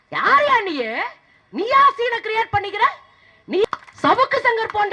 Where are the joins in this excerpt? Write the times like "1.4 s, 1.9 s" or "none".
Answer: 3.7 s